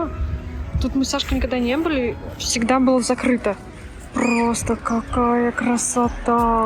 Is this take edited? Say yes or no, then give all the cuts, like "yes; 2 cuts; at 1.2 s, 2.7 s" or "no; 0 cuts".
no; 0 cuts